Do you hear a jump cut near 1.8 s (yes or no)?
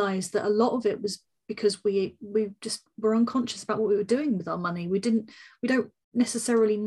no